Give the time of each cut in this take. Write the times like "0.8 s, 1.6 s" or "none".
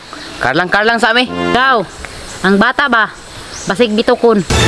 1.5 s